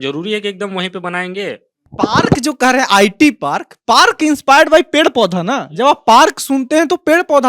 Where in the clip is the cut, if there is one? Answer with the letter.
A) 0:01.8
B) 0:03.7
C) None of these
C